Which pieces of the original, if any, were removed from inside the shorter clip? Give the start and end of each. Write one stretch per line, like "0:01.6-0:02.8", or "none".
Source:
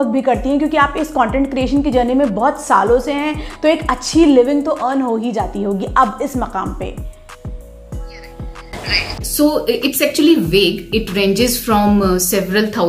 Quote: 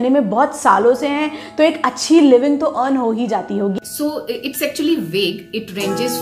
0:05.9-0:09.2